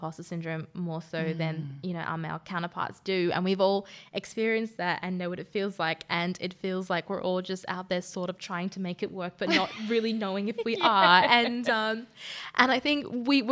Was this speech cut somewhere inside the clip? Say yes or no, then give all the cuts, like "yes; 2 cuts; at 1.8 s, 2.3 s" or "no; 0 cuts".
no; 0 cuts